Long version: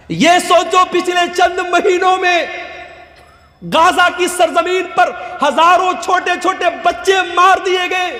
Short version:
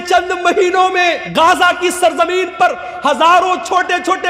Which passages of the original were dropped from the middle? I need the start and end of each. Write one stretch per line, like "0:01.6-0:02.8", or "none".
0:02.5-0:03.6